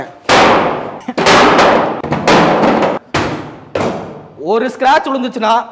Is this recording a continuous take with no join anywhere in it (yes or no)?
no